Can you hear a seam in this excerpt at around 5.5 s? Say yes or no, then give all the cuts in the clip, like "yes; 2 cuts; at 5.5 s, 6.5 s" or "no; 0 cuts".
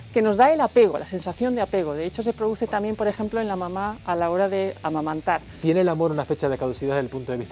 yes; 1 cut; at 5.5 s